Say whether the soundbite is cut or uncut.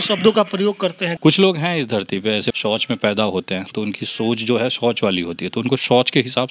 cut